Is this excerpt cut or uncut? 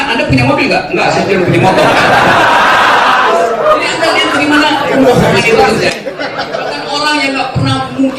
cut